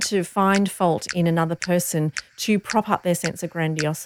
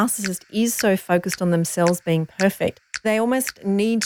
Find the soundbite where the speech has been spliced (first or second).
second